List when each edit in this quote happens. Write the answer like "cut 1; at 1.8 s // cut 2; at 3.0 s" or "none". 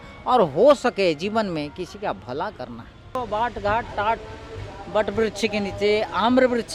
cut 1; at 3.2 s